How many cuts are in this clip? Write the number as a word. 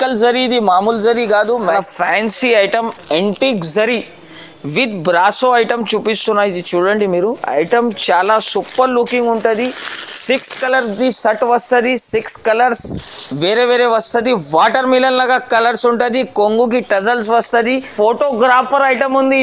two